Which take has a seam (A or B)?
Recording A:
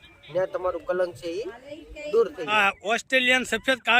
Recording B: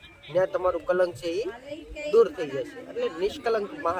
A